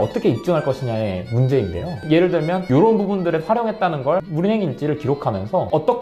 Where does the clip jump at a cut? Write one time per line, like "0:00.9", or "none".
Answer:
0:01.9
0:04.3